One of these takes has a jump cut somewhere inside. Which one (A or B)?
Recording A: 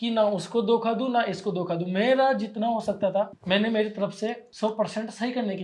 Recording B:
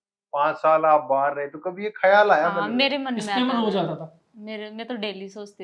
A